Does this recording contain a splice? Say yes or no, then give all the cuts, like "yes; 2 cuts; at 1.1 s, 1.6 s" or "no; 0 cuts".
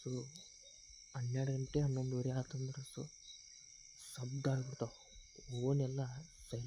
no; 0 cuts